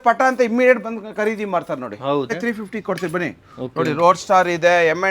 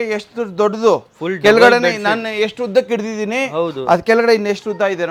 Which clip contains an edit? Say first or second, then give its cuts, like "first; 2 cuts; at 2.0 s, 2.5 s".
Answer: first; 1 cut; at 2.3 s